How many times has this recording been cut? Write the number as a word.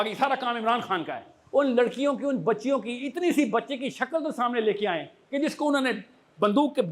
one